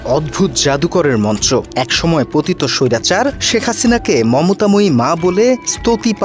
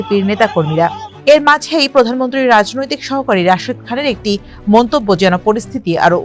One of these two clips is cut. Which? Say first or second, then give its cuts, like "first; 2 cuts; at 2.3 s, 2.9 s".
second; 1 cut; at 1.1 s